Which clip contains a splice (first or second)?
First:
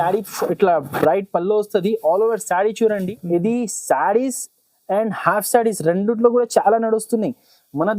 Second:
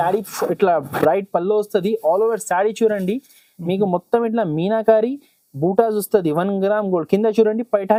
first